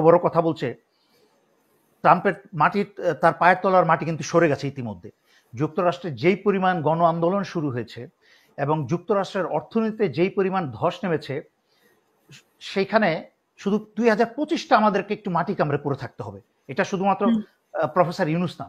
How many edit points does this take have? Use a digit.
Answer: 0